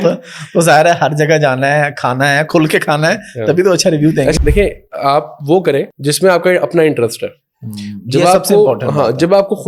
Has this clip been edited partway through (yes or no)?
yes